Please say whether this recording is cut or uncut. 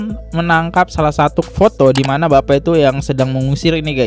uncut